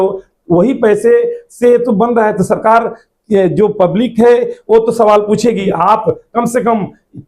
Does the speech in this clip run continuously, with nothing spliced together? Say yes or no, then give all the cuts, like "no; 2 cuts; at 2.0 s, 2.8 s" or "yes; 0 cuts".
no; 1 cut; at 5.7 s